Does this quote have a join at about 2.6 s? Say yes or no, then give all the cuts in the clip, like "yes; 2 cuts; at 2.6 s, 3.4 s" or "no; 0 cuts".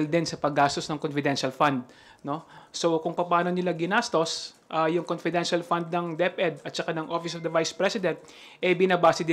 yes; 1 cut; at 2.6 s